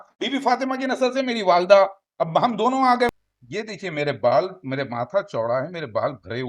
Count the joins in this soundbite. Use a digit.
1